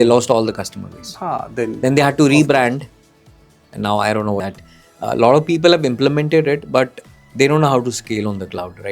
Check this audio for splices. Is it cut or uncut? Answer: cut